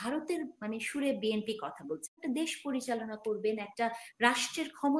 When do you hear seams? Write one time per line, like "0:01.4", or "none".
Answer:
0:02.1